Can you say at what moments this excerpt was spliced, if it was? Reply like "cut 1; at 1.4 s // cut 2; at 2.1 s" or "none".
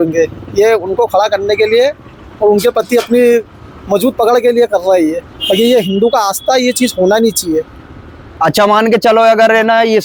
none